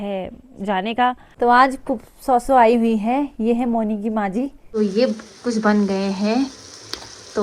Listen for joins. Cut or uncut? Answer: cut